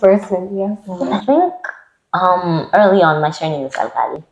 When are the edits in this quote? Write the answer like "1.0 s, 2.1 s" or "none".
1.1 s